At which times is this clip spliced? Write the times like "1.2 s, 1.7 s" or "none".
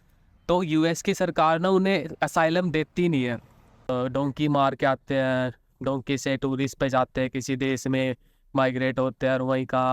3.9 s